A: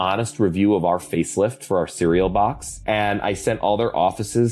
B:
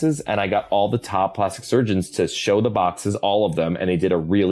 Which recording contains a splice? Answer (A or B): A